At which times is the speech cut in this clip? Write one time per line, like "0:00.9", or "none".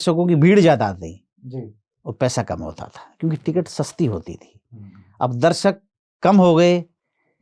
none